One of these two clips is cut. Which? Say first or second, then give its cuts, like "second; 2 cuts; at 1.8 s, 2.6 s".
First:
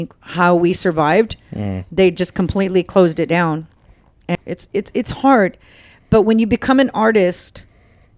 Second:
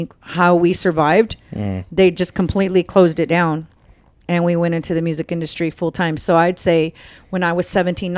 first; 1 cut; at 4.4 s